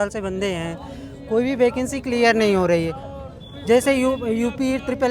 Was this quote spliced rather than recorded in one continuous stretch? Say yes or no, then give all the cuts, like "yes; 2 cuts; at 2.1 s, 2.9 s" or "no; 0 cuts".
no; 0 cuts